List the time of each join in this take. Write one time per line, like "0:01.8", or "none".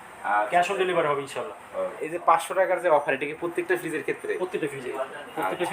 0:02.0